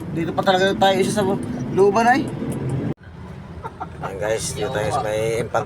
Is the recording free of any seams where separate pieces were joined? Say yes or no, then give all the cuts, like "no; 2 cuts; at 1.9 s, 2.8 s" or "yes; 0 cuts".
no; 1 cut; at 2.9 s